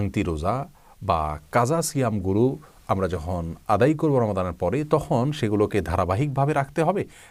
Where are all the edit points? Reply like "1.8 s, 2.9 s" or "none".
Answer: none